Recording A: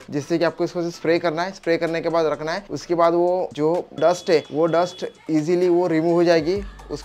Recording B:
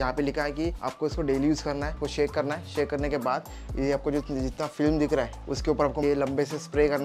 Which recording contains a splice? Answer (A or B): B